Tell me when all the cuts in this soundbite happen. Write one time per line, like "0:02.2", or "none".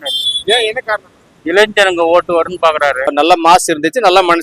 0:03.1